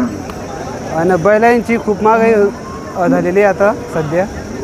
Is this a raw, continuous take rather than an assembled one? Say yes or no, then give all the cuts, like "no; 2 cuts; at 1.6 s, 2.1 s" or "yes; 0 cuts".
yes; 0 cuts